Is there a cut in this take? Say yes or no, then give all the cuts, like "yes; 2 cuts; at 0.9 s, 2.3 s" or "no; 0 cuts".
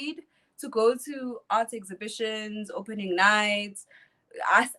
no; 0 cuts